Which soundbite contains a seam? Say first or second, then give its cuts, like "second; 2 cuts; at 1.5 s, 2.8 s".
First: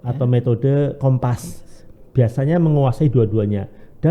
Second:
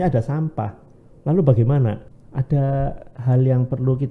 second; 1 cut; at 2.1 s